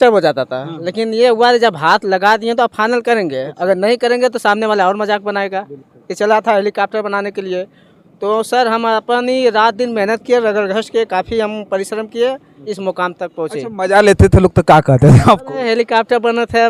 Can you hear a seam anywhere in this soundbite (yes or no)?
no